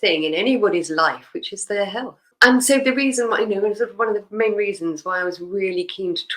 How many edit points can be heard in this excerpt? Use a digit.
1